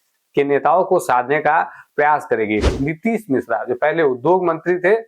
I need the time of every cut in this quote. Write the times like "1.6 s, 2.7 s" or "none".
2.7 s